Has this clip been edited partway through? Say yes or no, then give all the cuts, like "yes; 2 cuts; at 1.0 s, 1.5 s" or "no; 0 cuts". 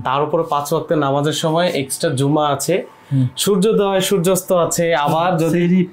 no; 0 cuts